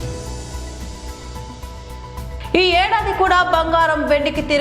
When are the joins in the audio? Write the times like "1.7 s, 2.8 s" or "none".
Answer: 1.8 s